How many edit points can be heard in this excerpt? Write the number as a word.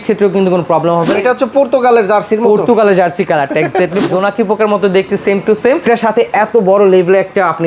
three